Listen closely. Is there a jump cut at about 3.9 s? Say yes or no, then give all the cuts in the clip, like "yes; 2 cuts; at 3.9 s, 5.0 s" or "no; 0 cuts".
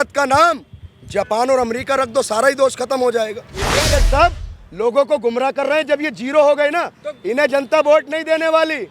yes; 1 cut; at 3.9 s